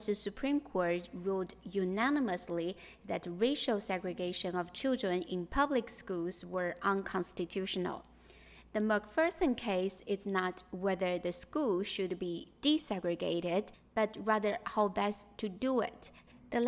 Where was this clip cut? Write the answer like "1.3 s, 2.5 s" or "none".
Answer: none